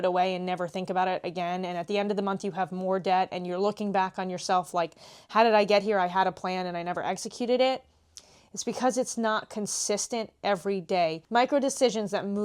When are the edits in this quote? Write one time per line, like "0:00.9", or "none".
0:11.2